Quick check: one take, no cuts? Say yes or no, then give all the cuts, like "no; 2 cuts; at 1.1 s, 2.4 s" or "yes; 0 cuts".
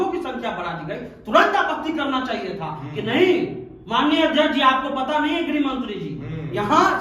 yes; 0 cuts